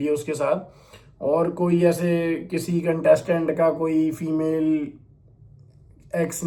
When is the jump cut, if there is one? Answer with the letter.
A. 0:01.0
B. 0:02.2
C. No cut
C